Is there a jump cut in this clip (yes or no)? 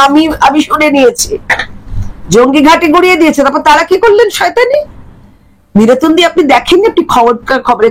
no